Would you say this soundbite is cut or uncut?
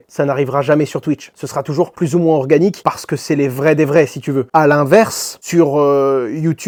uncut